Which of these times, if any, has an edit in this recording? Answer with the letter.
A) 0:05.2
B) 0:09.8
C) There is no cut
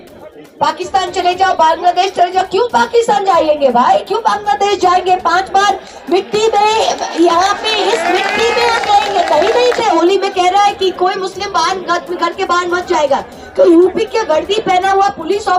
B